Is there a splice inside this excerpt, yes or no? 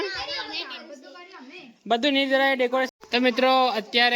yes